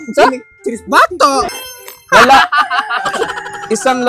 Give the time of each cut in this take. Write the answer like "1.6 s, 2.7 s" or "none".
1.6 s